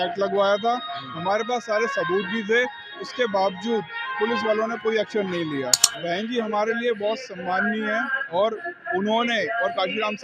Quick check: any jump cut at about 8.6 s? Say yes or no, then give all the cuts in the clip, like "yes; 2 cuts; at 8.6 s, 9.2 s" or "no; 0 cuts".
no; 1 cut; at 5.9 s